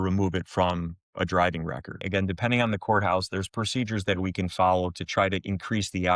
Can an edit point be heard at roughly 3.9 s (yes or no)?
no